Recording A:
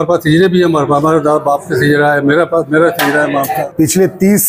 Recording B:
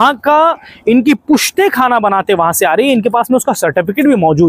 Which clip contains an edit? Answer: A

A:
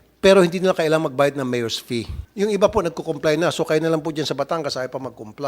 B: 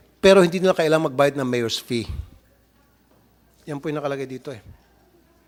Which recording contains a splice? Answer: A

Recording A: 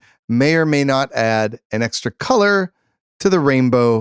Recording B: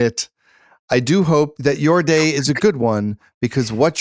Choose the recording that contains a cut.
B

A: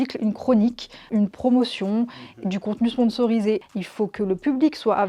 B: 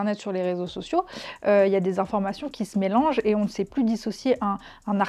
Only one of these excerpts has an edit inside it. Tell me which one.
A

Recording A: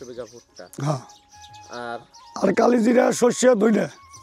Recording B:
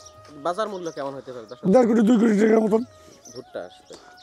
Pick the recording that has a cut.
B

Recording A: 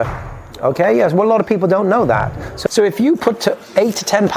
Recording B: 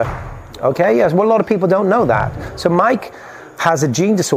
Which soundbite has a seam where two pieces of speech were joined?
A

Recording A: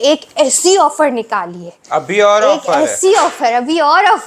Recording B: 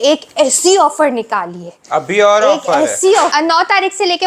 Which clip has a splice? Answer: B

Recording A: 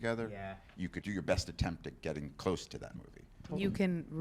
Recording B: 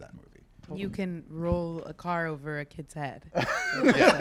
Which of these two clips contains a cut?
A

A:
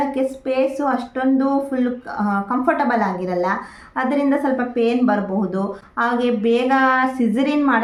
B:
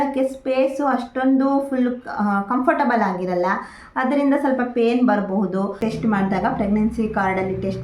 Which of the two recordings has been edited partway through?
B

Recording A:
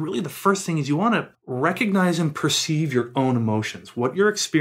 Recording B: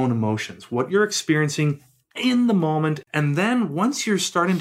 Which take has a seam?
B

